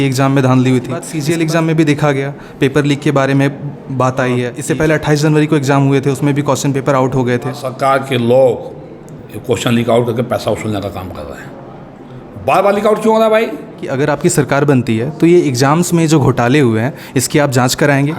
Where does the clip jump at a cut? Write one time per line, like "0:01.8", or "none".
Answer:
0:01.1
0:04.5
0:07.7
0:13.9